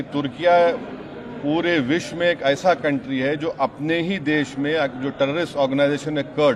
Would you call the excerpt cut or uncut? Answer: uncut